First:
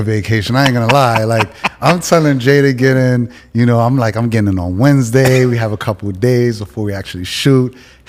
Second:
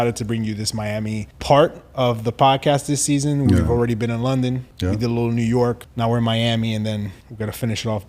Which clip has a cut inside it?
second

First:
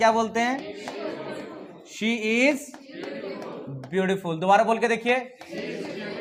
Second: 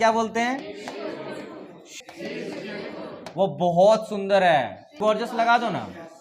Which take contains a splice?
second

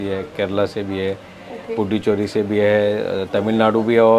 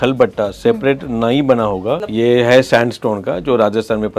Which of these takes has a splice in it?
second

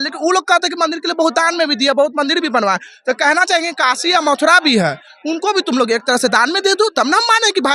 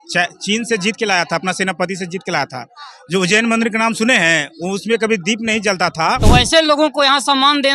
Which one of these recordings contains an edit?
second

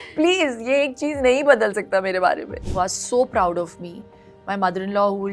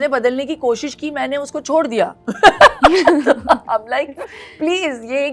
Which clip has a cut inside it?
first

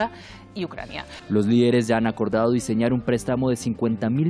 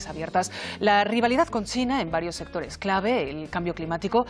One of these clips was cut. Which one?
first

